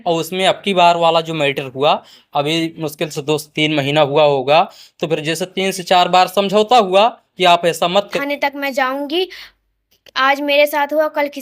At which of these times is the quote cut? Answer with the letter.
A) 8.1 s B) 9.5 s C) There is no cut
A